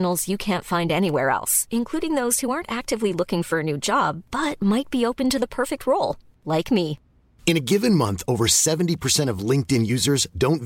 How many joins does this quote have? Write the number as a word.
zero